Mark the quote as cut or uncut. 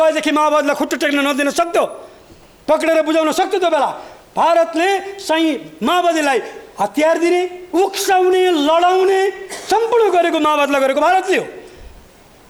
uncut